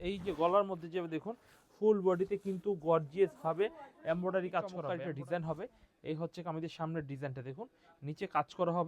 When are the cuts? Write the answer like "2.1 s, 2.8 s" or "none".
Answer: 4.8 s

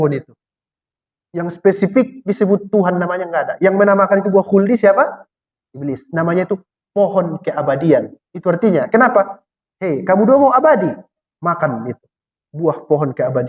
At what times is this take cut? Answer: none

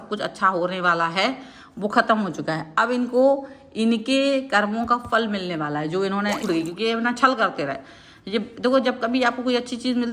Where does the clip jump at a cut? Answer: 6.4 s

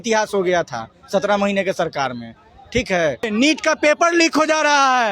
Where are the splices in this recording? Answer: 3.3 s

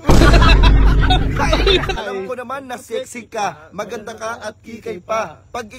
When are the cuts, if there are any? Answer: 2.0 s

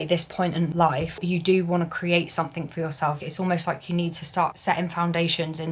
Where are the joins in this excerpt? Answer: 1.1 s, 3.2 s, 4.6 s

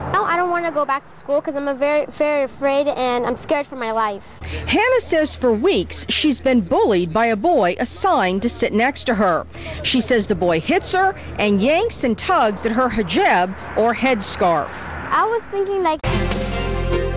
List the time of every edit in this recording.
none

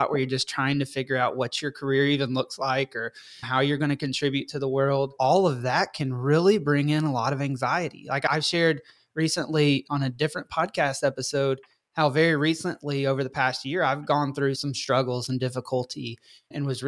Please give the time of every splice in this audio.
none

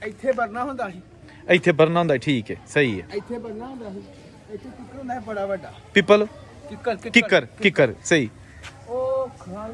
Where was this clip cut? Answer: none

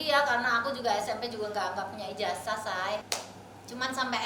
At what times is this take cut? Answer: 3.0 s

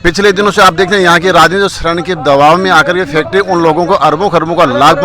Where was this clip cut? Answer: none

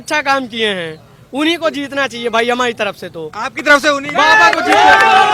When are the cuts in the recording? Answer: none

